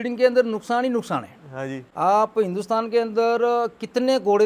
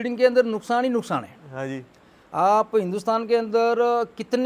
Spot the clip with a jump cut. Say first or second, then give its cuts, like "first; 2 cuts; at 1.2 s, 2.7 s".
first; 1 cut; at 1.8 s